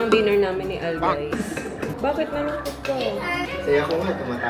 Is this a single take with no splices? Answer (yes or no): no